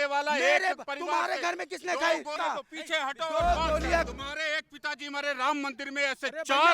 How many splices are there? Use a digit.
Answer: 2